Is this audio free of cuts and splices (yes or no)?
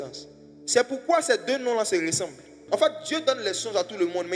no